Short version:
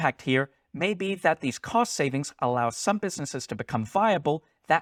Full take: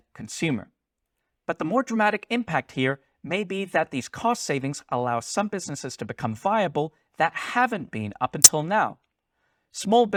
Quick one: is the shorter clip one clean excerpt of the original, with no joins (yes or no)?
yes